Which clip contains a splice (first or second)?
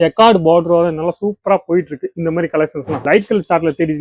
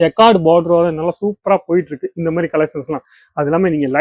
first